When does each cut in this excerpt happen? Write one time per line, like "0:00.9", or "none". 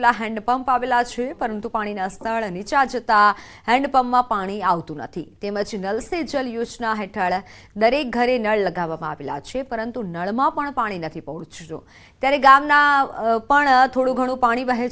0:01.3